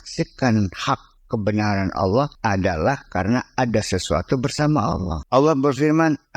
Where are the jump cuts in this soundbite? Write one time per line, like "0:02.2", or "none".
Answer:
0:02.3
0:05.1